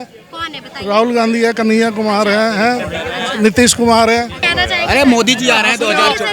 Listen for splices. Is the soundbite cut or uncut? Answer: cut